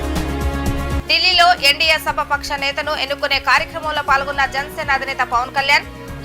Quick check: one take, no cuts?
no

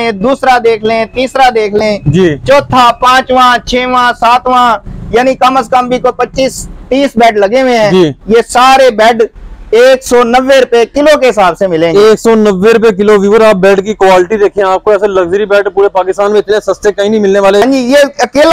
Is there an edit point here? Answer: yes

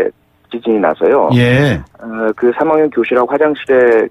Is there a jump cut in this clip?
no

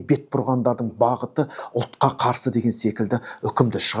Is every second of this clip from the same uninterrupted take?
yes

